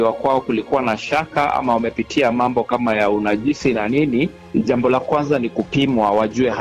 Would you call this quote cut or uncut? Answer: cut